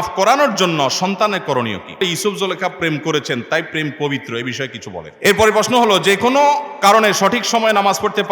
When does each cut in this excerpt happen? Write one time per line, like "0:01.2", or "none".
0:02.0
0:05.1